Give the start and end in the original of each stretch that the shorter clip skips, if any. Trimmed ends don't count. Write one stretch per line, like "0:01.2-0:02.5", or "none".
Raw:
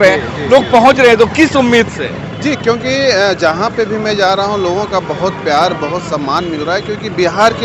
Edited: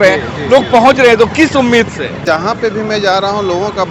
0:02.2-0:03.4